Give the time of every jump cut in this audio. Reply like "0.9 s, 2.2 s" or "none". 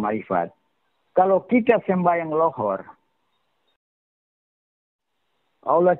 none